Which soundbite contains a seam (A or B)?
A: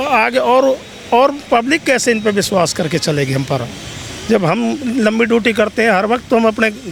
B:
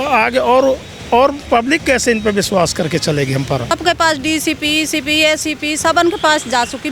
B